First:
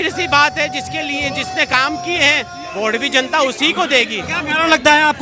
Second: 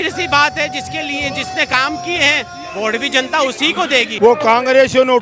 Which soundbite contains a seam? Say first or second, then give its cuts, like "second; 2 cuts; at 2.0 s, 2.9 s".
second; 1 cut; at 4.1 s